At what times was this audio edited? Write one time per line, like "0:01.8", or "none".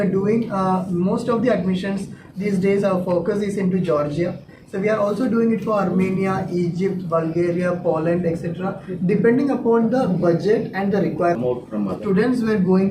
0:11.7